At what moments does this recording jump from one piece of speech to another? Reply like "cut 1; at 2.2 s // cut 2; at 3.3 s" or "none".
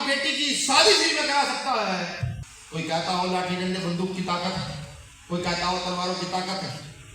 cut 1; at 2.3 s